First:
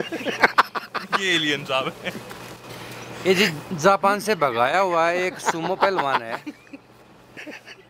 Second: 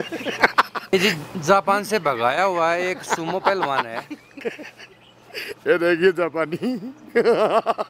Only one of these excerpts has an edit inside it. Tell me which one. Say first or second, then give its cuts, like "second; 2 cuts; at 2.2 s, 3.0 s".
second; 2 cuts; at 0.9 s, 4.4 s